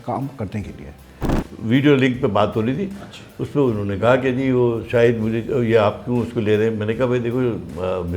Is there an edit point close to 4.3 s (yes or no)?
no